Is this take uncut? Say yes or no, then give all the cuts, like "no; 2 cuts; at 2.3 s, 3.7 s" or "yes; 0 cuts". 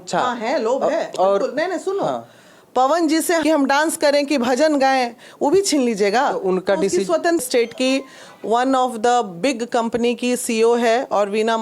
no; 2 cuts; at 3.4 s, 7.4 s